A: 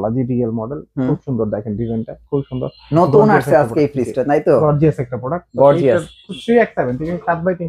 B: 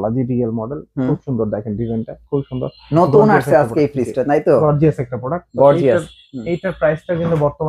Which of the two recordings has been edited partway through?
A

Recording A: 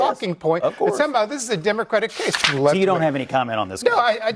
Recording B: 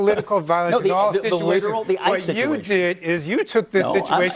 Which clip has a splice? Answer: A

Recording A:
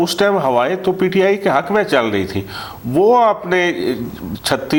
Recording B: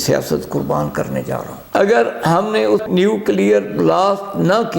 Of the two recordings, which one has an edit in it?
B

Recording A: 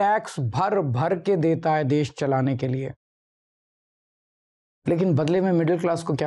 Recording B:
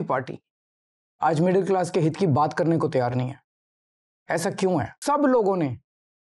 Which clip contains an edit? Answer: B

